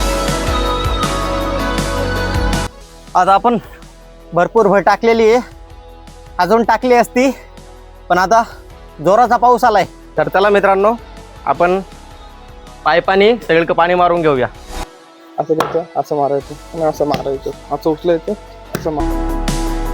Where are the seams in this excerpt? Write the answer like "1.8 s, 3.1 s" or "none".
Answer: 2.7 s, 10.0 s, 14.7 s, 19.0 s